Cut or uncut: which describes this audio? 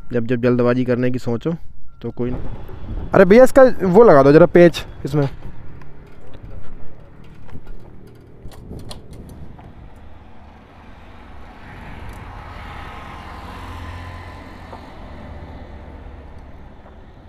cut